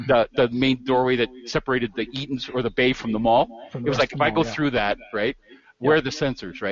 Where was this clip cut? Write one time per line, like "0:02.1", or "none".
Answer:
none